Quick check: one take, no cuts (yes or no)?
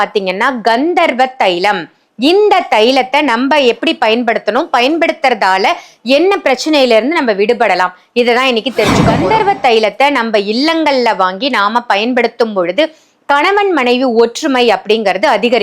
no